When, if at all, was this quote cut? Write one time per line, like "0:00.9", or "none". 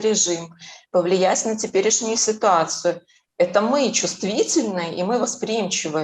none